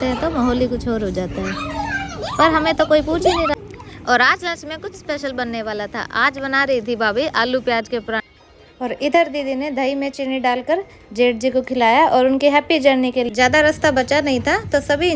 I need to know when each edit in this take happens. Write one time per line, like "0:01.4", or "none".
0:03.6
0:08.3
0:13.3